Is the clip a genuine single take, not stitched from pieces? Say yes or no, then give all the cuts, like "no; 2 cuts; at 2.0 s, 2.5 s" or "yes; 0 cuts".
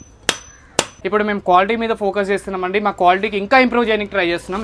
no; 1 cut; at 1.0 s